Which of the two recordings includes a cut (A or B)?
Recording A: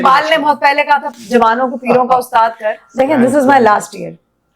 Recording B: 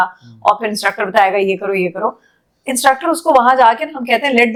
A